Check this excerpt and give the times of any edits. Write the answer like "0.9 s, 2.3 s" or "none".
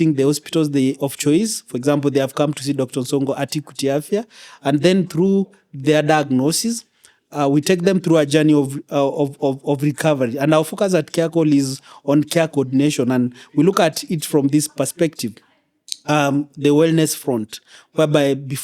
none